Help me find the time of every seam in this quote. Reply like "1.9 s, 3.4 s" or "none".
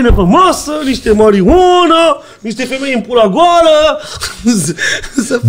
none

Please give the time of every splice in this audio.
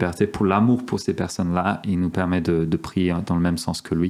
none

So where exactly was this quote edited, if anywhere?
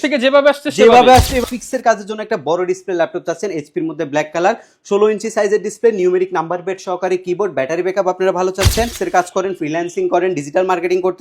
1.4 s, 9.0 s

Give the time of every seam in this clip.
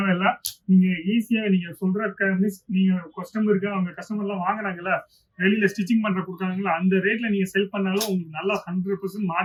none

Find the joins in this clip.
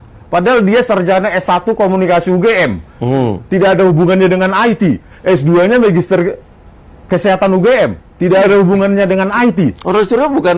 none

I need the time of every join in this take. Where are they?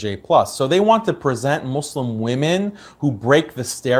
1.6 s

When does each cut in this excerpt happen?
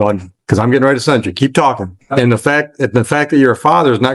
1.9 s

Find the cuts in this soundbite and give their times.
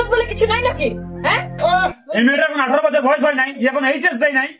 2.0 s

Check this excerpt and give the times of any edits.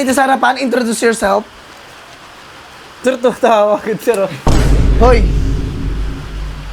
none

